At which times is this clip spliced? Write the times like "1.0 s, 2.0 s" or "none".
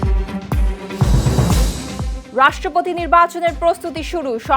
2.1 s